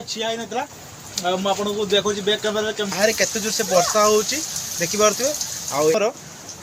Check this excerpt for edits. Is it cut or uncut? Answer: cut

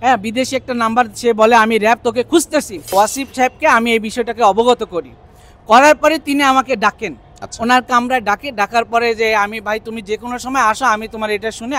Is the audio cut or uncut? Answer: cut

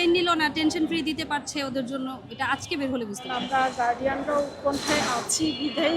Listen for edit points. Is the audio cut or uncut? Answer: cut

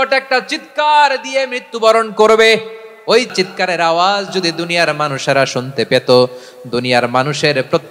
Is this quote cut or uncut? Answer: cut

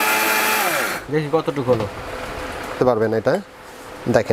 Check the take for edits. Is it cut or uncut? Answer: cut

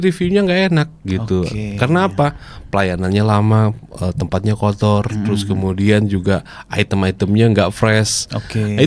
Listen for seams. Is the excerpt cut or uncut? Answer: uncut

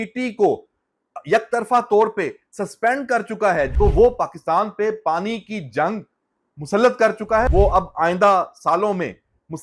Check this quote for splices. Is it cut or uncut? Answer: cut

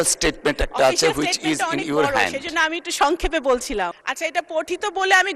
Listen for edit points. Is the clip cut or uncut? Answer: cut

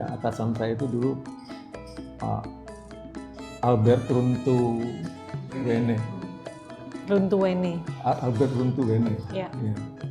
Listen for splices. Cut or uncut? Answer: uncut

